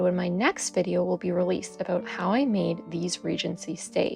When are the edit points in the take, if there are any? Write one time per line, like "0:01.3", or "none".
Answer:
0:02.1